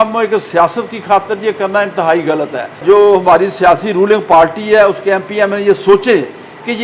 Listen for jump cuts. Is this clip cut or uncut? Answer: cut